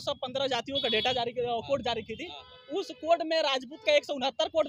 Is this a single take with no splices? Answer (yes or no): yes